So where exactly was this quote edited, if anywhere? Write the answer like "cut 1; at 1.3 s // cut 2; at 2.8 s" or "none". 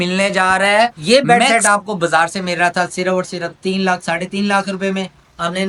cut 1; at 1.0 s